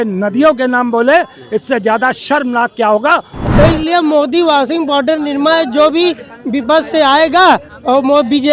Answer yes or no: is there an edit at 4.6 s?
no